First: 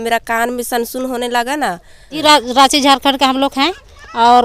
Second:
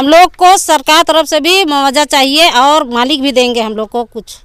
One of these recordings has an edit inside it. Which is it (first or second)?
first